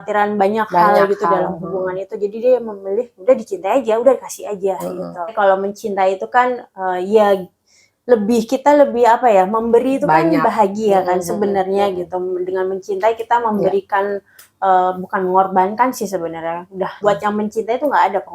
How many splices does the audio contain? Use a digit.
2